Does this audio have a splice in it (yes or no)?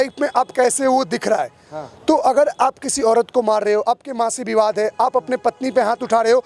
no